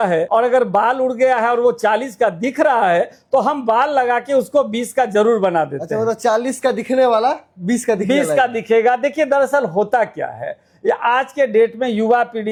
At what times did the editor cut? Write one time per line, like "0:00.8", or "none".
none